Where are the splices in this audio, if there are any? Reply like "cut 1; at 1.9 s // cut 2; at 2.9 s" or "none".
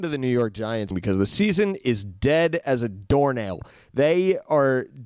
cut 1; at 0.9 s